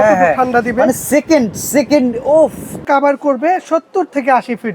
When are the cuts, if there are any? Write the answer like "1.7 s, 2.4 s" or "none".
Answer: 2.8 s